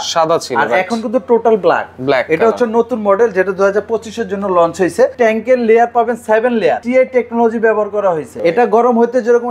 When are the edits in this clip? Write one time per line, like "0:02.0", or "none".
0:05.1
0:06.8
0:08.3